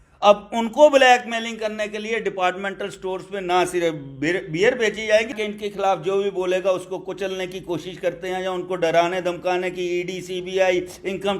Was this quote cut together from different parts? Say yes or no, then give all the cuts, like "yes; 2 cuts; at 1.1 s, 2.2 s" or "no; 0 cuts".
yes; 1 cut; at 5.4 s